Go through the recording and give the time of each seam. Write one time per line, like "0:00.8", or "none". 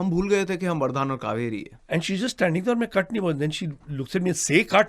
0:01.7